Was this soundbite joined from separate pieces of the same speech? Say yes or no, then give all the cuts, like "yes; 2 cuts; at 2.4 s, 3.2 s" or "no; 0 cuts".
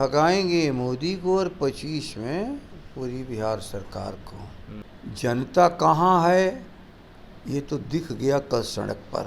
yes; 1 cut; at 4.9 s